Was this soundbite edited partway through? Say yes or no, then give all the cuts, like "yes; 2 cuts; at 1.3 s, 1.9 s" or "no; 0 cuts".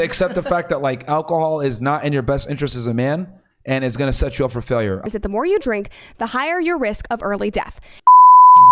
yes; 2 cuts; at 5.0 s, 7.8 s